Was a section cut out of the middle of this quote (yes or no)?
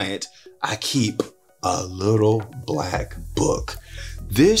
no